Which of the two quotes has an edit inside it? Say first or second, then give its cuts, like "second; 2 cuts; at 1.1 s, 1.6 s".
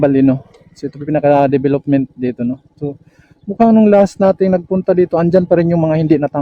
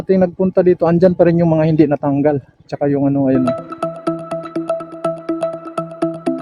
second; 1 cut; at 3.5 s